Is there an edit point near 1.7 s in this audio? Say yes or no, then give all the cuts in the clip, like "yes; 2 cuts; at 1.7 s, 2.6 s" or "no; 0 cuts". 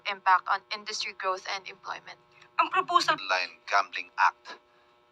no; 1 cut; at 3.2 s